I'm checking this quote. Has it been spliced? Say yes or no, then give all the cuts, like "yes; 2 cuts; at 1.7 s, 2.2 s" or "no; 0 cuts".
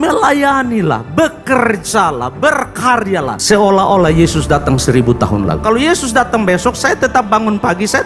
yes; 1 cut; at 5.6 s